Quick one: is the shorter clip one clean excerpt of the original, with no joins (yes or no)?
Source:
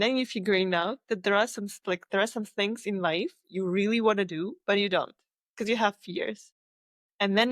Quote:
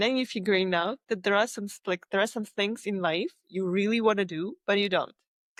yes